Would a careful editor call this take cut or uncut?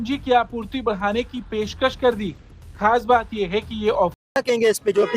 cut